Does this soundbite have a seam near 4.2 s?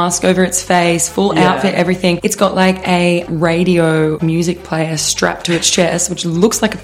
yes; 2 cuts; at 2.2 s, 4.2 s

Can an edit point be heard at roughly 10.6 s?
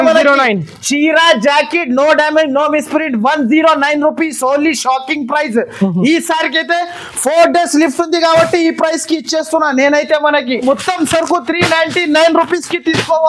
yes; 1 cut; at 10.6 s

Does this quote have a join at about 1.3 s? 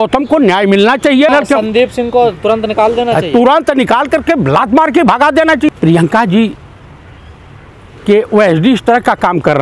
yes; 2 cuts; at 1.3 s, 5.7 s

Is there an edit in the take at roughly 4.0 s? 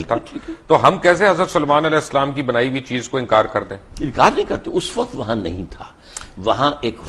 no; 0 cuts

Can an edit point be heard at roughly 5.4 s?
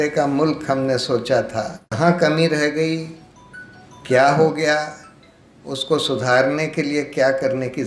no; 1 cut; at 2.0 s

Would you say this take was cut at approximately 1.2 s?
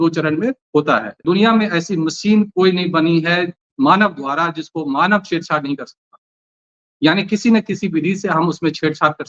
yes; 1 cut; at 1.2 s

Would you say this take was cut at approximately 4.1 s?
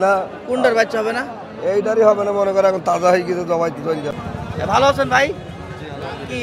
yes; 1 cut; at 4.1 s

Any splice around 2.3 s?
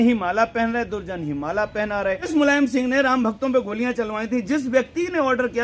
yes; 1 cut; at 2.3 s

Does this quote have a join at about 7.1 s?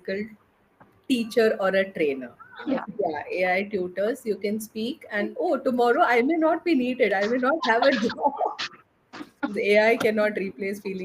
no; 3 cuts; at 2.8 s, 5.3 s, 9.5 s

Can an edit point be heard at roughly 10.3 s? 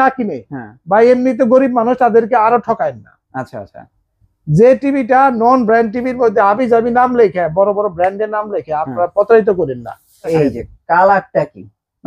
yes; 1 cut; at 10.3 s

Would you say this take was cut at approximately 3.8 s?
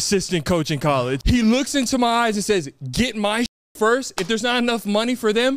no; 1 cut; at 1.2 s

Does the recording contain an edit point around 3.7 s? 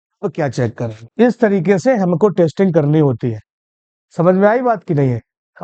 no; 1 cut; at 1.0 s

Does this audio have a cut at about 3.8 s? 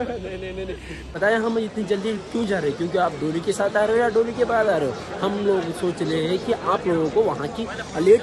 no; 1 cut; at 1.1 s

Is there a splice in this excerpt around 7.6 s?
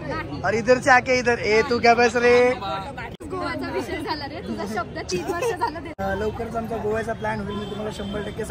no; 2 cuts; at 3.1 s, 6.0 s

